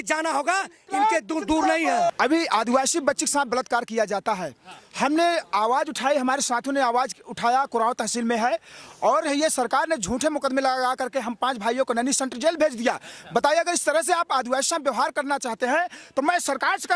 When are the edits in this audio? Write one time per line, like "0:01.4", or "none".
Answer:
0:02.1